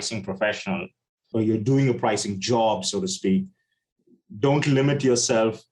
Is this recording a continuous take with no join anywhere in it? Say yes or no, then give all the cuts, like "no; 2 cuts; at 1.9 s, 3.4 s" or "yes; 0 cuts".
no; 1 cut; at 1.3 s